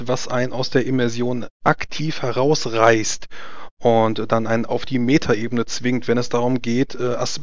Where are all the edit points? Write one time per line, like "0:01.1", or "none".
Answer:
none